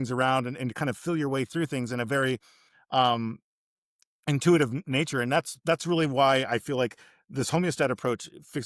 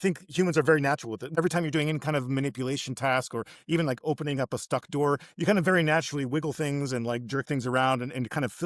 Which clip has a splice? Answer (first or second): second